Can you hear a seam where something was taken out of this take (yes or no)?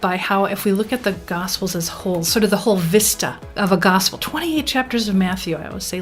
no